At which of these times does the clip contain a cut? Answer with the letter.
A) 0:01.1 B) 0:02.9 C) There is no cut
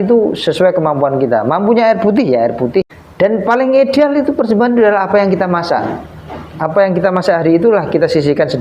B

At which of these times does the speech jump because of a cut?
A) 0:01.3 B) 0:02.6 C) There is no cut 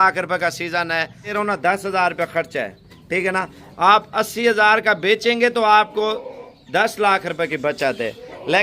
A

